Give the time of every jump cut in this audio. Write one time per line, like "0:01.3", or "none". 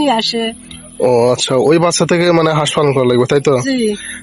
none